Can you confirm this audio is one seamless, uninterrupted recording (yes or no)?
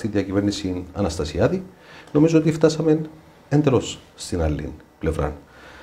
yes